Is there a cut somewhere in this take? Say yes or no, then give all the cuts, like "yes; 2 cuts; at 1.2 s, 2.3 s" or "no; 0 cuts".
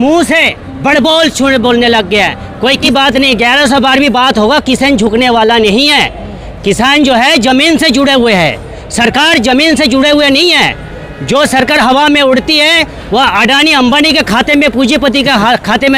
yes; 1 cut; at 2.8 s